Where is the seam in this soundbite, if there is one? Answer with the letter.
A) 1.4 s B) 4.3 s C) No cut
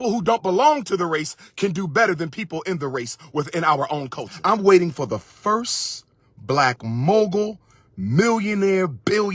B